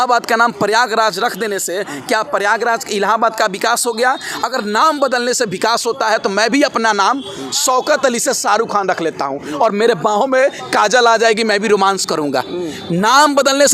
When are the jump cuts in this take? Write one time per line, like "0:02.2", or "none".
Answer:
none